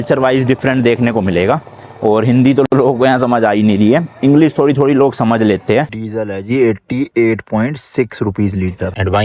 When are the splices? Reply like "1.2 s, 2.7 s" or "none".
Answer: 5.9 s